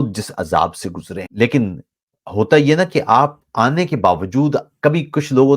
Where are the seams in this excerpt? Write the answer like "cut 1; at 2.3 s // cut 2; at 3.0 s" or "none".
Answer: cut 1; at 1.2 s